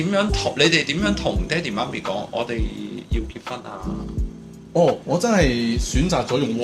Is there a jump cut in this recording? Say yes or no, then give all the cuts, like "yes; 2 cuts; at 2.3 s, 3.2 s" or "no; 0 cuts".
no; 0 cuts